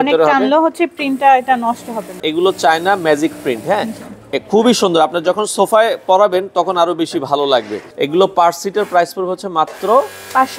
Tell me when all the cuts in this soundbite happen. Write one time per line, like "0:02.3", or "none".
0:02.2
0:07.8